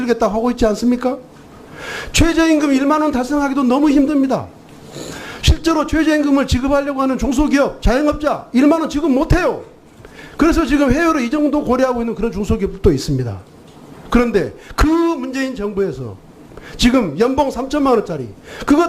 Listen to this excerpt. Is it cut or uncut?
cut